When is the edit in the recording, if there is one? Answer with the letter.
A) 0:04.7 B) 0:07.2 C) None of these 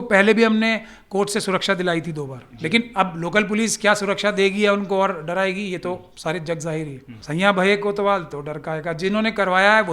B